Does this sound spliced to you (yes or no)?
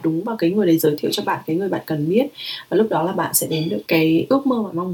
yes